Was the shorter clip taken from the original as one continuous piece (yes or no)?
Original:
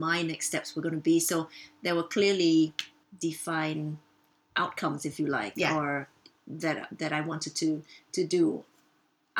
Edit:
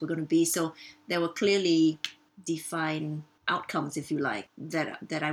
no